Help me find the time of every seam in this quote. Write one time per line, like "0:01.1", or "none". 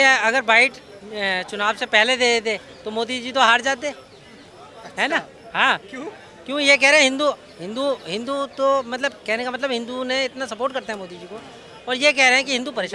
none